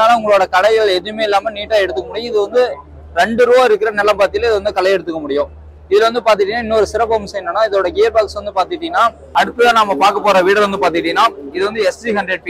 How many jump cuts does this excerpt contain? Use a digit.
1